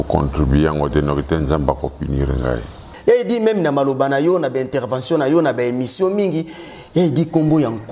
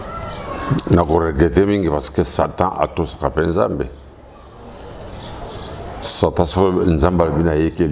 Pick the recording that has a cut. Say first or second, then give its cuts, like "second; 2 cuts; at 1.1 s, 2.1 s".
first; 1 cut; at 2.8 s